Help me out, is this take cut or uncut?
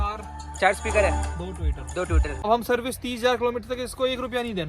cut